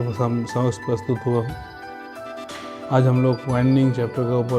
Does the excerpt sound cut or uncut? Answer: cut